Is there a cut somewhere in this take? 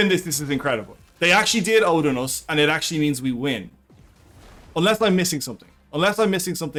no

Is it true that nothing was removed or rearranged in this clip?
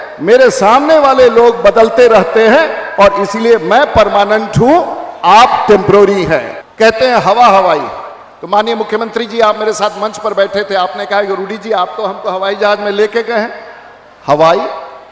no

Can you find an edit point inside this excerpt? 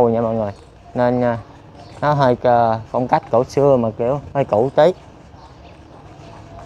no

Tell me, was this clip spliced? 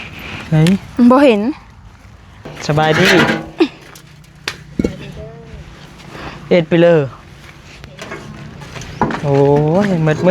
yes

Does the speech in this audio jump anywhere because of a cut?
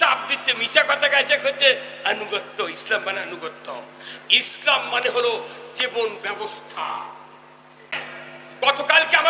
yes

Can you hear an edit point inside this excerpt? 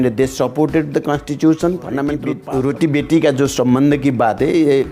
yes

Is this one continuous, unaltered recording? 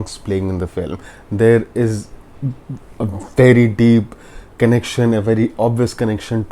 yes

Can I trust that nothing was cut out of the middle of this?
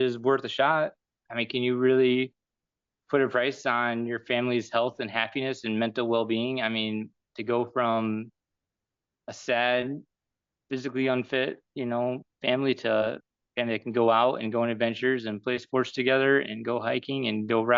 no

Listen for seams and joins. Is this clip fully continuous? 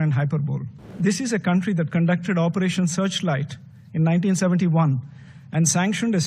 no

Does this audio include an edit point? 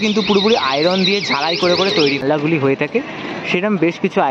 yes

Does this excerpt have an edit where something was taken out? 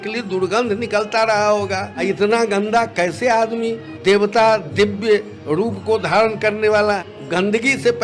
yes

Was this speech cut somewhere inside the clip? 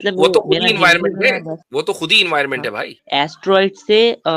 yes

